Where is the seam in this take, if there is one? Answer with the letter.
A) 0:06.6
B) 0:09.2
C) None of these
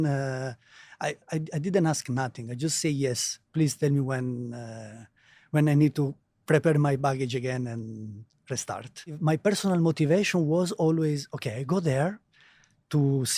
B